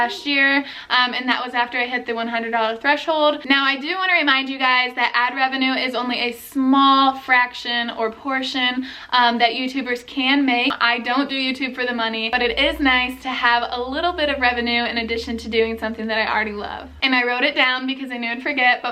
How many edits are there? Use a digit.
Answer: 4